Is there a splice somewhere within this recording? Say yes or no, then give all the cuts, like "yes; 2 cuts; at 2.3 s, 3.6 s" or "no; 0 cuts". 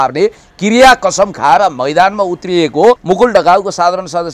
yes; 1 cut; at 3.0 s